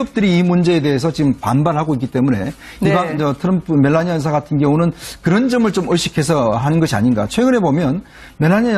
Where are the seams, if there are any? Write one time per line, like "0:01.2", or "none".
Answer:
none